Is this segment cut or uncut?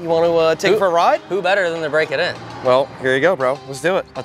uncut